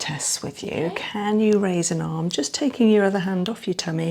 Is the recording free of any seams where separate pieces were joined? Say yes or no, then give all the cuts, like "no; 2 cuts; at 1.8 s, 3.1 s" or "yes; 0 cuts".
yes; 0 cuts